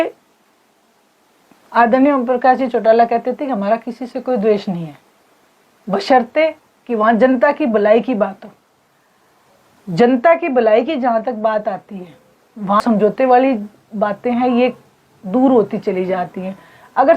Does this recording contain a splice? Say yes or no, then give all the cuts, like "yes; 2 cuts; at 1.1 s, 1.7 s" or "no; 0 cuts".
yes; 1 cut; at 12.8 s